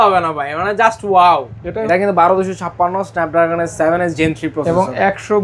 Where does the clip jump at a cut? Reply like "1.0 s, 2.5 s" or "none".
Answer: 1.8 s